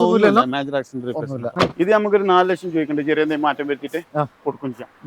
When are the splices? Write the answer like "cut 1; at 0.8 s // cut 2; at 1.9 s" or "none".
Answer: cut 1; at 1.5 s